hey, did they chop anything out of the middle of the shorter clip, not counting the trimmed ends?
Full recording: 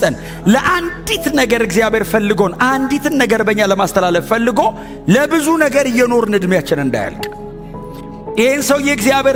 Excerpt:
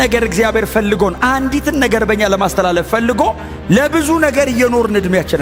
no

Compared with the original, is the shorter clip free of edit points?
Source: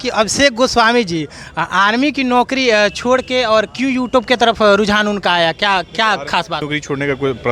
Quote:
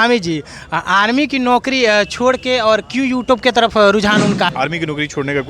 no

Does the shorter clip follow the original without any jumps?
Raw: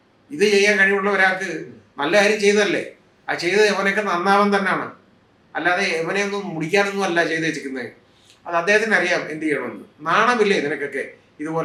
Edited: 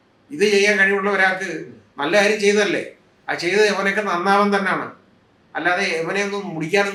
yes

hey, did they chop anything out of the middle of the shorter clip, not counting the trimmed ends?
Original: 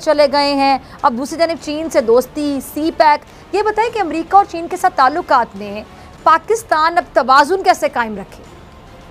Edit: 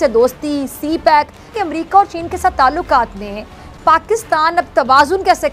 yes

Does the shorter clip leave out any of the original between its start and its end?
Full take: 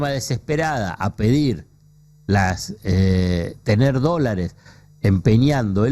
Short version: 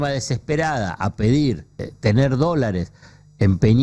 yes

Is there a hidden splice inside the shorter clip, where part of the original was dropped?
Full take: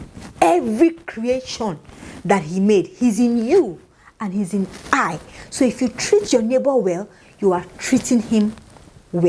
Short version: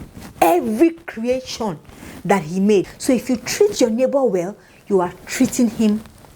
yes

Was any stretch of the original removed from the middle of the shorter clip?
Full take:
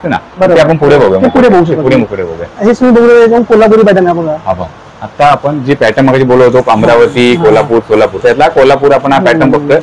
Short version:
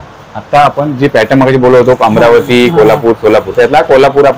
no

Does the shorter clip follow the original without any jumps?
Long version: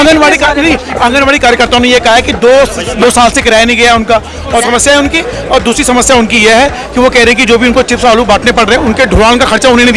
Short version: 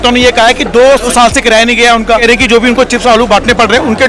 no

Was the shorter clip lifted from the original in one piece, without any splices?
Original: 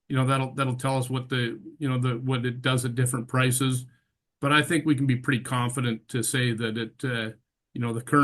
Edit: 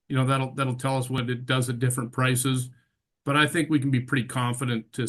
no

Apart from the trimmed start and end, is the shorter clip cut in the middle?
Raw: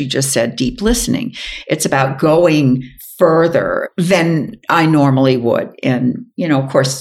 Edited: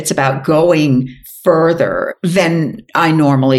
no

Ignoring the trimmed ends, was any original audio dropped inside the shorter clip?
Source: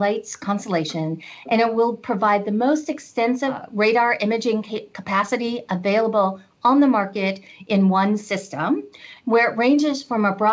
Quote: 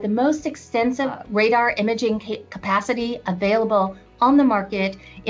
no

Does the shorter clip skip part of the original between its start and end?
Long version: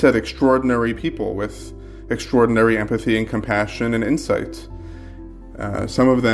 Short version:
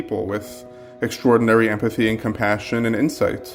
no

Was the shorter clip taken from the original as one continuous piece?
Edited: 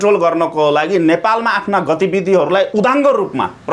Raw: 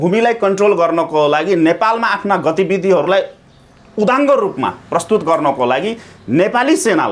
no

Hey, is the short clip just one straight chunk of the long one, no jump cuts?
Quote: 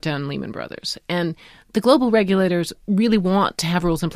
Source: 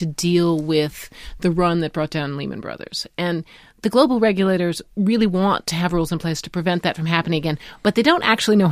yes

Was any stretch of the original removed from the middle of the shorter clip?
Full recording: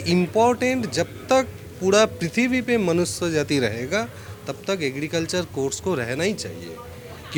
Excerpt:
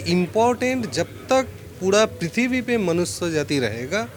no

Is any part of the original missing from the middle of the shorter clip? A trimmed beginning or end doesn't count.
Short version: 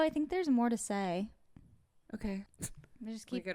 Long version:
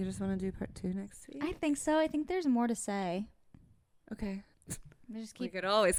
yes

